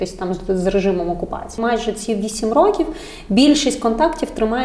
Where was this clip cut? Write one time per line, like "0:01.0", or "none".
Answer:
0:01.6

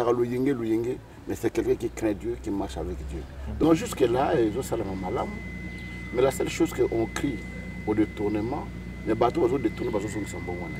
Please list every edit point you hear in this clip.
0:03.6

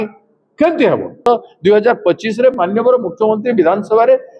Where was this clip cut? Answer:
0:01.3

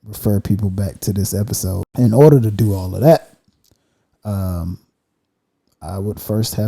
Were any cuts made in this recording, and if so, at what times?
0:01.8

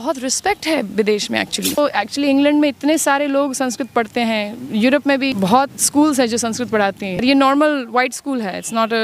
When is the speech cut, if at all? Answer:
0:01.8
0:05.3
0:07.2

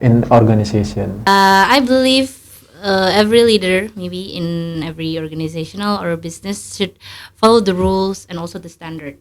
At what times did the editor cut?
0:01.3

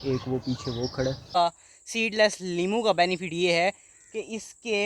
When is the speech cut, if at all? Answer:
0:01.3

